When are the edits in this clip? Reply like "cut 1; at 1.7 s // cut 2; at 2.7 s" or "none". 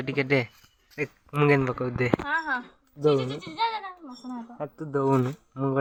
none